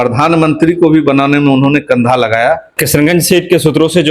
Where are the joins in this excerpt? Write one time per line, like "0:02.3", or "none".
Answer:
0:02.7